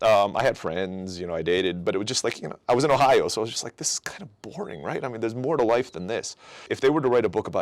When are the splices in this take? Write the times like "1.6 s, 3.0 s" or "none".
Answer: 6.7 s